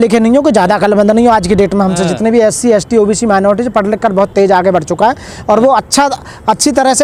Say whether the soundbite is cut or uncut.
uncut